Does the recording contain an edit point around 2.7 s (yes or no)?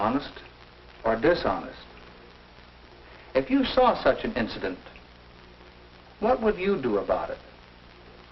no